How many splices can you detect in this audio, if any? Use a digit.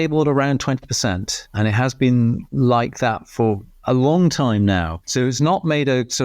1